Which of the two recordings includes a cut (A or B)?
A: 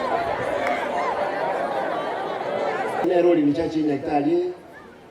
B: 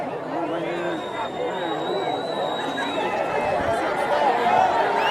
A